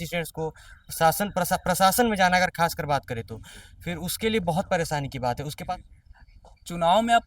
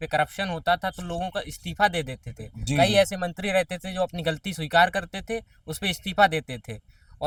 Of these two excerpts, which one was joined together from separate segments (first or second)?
first